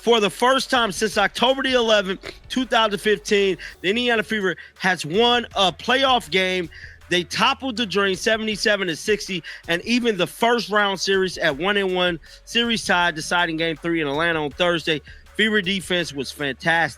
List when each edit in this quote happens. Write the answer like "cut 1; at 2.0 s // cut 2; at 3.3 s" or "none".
none

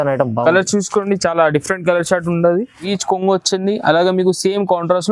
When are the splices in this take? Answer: cut 1; at 2.9 s

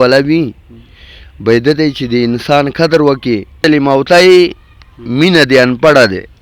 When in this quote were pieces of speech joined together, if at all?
cut 1; at 3.5 s

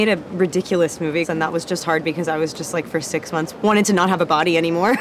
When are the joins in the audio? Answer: cut 1; at 1.3 s

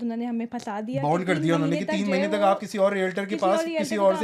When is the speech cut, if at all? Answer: none

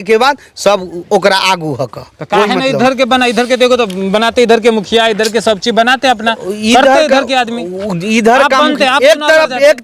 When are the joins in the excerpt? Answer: none

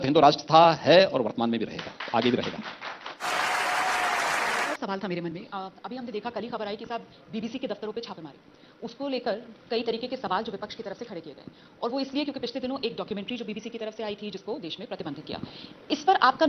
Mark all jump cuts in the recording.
none

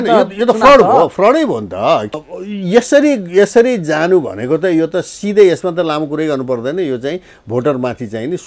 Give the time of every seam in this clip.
cut 1; at 2.2 s

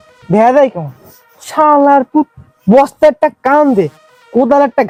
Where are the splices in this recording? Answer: none

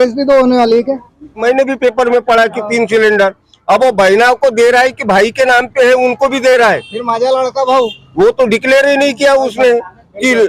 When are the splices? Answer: cut 1; at 1.4 s

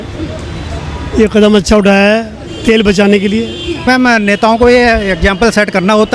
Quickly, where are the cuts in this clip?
cut 1; at 3.9 s

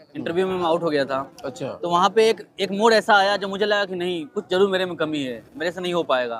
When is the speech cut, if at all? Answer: none

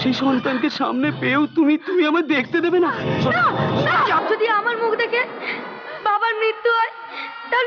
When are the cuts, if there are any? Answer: cut 1; at 4.2 s

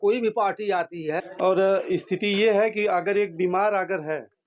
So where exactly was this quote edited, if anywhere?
cut 1; at 1.3 s

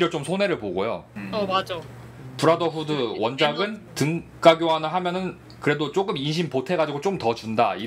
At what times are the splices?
cut 1; at 1.1 s // cut 2; at 3.8 s

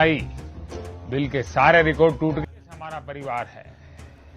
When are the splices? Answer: cut 1; at 2.4 s

